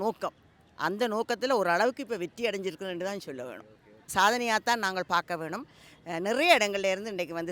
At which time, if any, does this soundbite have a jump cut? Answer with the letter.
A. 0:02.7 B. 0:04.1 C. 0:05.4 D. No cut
B